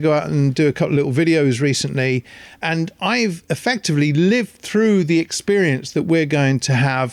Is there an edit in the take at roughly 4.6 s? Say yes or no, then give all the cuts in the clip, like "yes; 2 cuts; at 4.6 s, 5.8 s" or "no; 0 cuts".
no; 0 cuts